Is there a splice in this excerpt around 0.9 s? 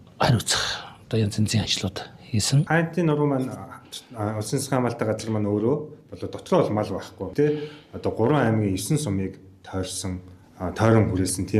no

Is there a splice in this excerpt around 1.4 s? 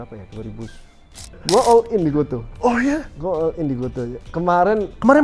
yes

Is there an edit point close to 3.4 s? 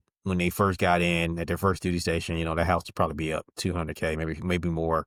no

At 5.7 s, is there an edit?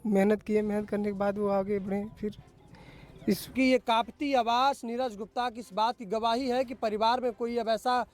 no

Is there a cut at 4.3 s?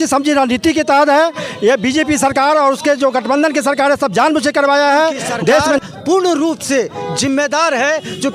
no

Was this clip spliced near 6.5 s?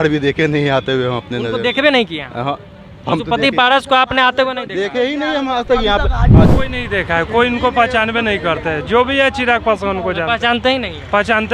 yes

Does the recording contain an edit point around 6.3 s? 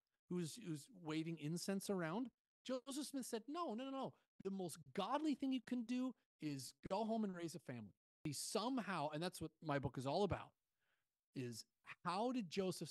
no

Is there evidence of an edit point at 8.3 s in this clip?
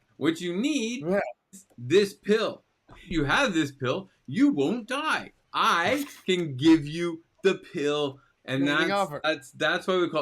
yes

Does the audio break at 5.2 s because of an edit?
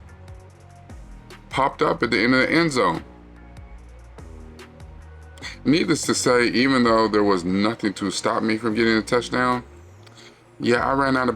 yes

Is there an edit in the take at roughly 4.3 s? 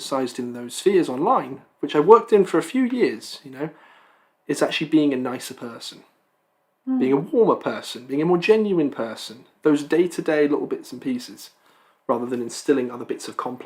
no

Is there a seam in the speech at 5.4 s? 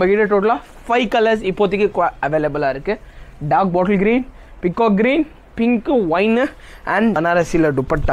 no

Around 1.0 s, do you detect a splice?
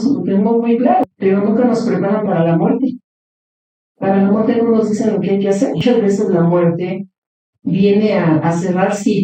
yes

